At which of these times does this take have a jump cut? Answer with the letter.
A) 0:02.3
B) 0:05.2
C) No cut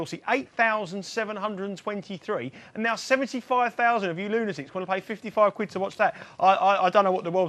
B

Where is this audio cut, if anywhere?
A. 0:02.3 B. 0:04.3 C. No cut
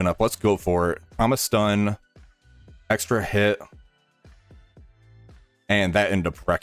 B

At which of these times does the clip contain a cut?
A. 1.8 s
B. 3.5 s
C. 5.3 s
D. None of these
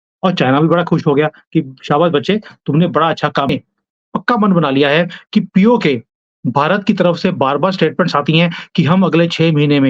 B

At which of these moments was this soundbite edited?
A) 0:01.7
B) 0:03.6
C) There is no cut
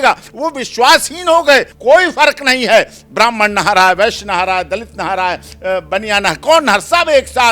A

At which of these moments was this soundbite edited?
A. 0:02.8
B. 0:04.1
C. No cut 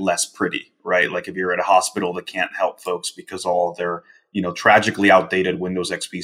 C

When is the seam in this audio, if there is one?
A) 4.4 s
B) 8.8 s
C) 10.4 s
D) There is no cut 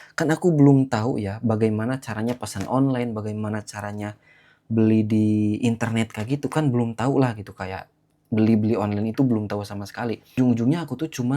C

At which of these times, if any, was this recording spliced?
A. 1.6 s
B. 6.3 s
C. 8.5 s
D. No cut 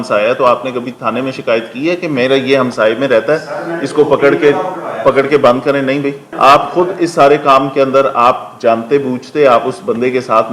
B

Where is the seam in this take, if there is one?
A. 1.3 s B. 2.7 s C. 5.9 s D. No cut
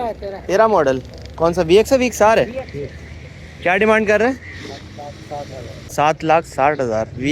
C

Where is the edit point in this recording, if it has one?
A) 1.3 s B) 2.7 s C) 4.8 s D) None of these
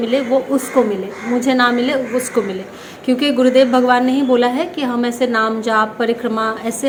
D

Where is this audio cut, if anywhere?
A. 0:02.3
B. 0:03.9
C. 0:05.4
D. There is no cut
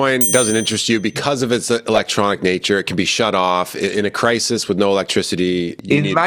D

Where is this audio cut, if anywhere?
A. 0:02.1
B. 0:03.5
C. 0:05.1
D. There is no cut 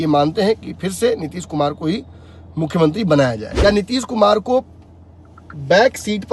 B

